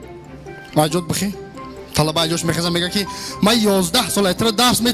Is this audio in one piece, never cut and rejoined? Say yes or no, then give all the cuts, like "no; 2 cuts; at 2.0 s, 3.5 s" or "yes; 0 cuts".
no; 1 cut; at 3.3 s